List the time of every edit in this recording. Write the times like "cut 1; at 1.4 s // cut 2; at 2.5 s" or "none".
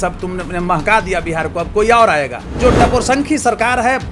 cut 1; at 2.5 s